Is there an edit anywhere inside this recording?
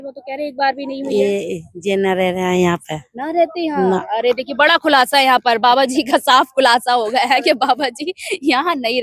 no; 0 cuts

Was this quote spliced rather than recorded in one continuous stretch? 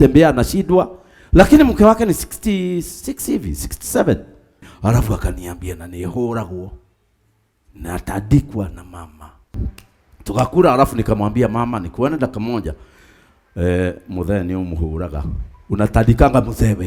yes; 2 cuts; at 4.7 s, 9.5 s

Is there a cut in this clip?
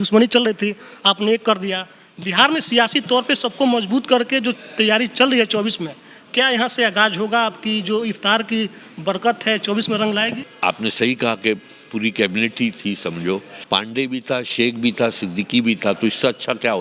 yes; 2 cuts; at 10.5 s, 13.5 s

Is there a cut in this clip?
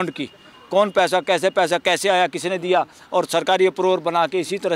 no; 0 cuts

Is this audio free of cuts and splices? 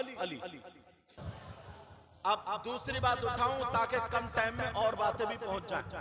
no; 1 cut; at 1.3 s

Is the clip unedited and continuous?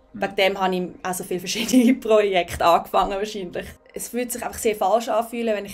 no; 1 cut; at 3.6 s

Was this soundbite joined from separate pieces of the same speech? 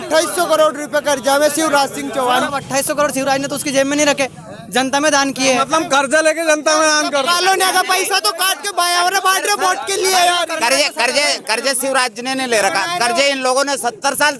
yes; 1 cut; at 2.5 s

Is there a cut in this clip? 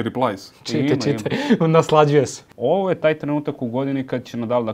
yes; 1 cut; at 2.4 s

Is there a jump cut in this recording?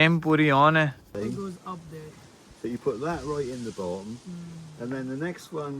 yes; 1 cut; at 1.1 s

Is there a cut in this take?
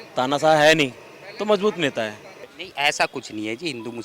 yes; 1 cut; at 2.4 s

